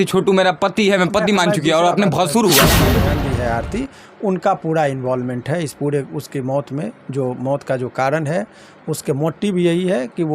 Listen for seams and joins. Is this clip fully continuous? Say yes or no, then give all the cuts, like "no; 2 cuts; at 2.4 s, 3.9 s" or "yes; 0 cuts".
no; 1 cut; at 3.1 s